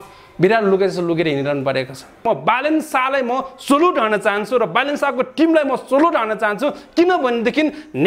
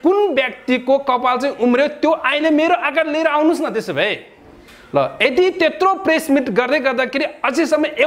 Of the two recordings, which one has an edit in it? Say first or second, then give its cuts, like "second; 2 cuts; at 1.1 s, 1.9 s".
first; 1 cut; at 2.2 s